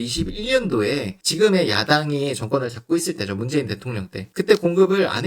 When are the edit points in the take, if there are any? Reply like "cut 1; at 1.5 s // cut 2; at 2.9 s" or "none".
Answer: cut 1; at 1.1 s

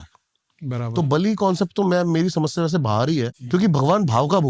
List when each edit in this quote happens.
cut 1; at 3.4 s

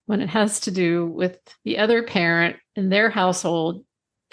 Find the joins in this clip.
cut 1; at 1.5 s // cut 2; at 2.6 s

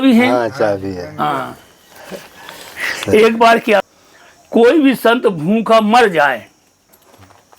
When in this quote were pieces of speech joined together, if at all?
cut 1; at 3.8 s

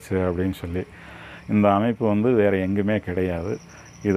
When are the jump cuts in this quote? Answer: none

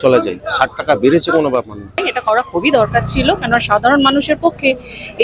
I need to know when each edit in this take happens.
cut 1; at 2.0 s

